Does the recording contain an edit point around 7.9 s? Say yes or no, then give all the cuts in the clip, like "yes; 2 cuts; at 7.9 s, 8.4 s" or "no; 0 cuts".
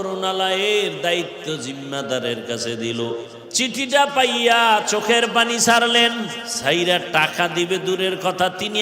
no; 2 cuts; at 3.4 s, 6.5 s